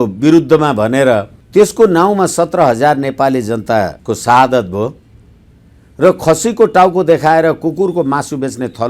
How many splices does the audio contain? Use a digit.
2